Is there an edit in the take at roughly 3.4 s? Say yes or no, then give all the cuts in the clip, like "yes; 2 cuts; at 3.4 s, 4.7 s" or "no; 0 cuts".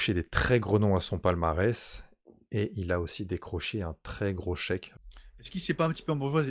no; 1 cut; at 4.9 s